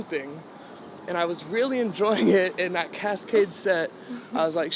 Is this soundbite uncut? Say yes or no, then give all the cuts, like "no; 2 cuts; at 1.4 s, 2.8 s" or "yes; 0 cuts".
yes; 0 cuts